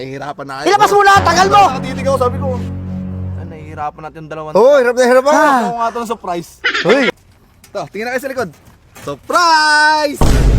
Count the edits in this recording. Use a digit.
1